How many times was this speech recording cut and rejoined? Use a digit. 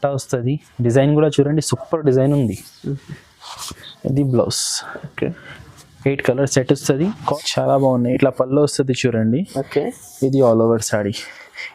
2